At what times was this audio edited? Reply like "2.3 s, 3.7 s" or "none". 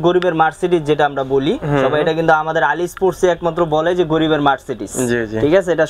none